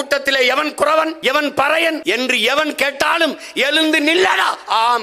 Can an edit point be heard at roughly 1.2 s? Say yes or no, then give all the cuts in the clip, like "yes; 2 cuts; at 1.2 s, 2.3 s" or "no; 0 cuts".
yes; 2 cuts; at 1.2 s, 2.0 s